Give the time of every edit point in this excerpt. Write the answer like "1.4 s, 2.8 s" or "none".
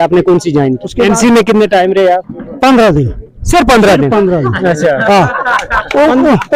0.9 s, 2.4 s